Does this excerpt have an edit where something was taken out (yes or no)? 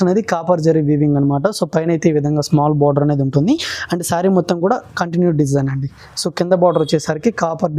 no